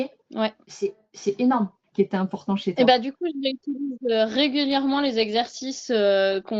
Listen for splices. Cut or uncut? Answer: cut